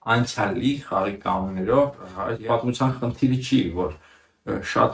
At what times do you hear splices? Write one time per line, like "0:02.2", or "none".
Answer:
0:02.1